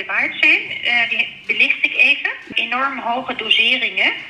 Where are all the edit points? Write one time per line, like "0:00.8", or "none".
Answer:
0:02.5

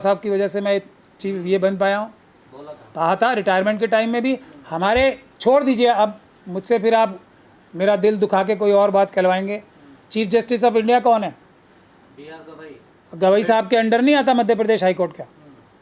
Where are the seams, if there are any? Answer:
none

